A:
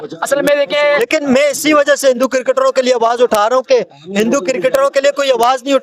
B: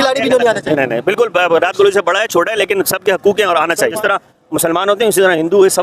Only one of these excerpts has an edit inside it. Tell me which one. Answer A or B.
B